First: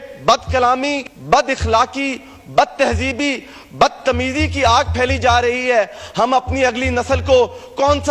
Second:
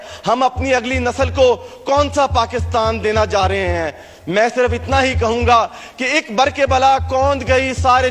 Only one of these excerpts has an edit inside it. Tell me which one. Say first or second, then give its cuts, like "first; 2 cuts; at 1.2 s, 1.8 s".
first; 1 cut; at 1.1 s